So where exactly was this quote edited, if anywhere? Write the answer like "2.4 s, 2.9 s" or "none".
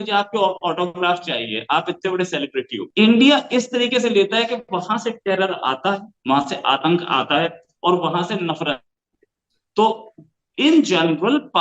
2.8 s